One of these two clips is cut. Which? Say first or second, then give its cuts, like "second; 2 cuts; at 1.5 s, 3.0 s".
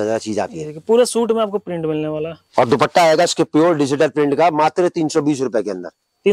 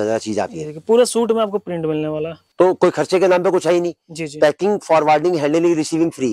second; 1 cut; at 2.3 s